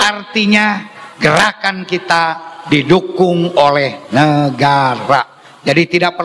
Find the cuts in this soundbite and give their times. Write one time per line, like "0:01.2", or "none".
none